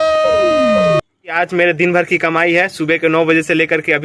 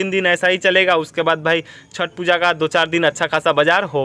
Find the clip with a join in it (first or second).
first